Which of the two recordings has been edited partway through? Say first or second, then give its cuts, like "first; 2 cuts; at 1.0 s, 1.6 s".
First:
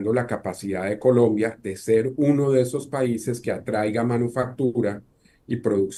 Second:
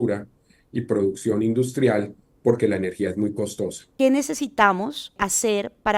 second; 2 cuts; at 3.8 s, 5.1 s